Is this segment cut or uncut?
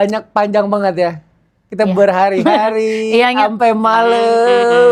uncut